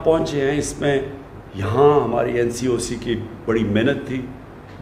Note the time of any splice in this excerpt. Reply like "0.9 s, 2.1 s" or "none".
none

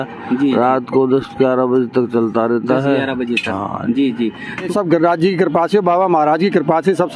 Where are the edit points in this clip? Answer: 4.7 s

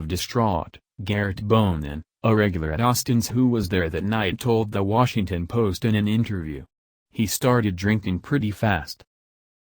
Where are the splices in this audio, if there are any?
4.4 s, 5.8 s

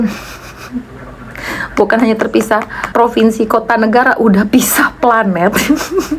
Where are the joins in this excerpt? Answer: 2.8 s

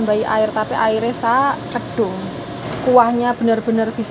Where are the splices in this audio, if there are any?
2.6 s

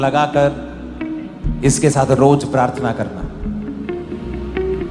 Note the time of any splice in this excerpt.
none

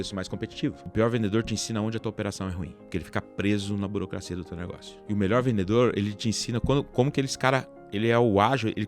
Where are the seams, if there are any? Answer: 0.8 s, 2.6 s, 4.9 s

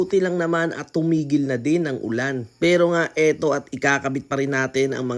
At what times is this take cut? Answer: none

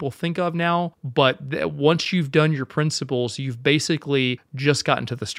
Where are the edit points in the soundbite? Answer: 1.0 s, 4.5 s

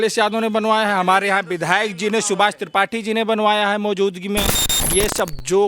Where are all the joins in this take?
4.7 s

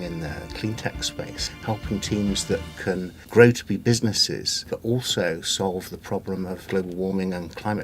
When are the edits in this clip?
1.4 s, 3.2 s, 4.7 s, 6.6 s

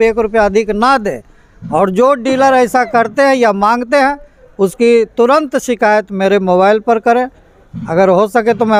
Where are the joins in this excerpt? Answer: none

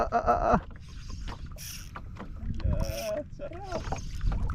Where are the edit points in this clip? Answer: none

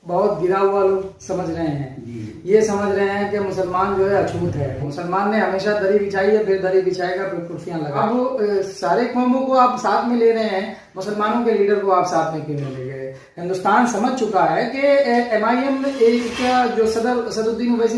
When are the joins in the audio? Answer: 4.8 s, 8.0 s

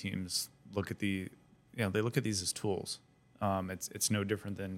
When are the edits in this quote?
none

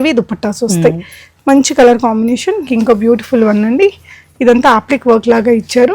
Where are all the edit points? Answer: 2.6 s

